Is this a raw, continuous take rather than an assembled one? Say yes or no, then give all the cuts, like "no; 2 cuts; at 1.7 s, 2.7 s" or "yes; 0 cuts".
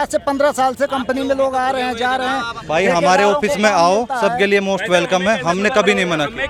yes; 0 cuts